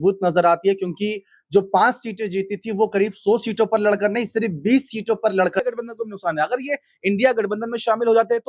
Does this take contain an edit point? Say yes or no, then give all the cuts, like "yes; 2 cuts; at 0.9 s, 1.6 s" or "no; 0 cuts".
yes; 1 cut; at 5.6 s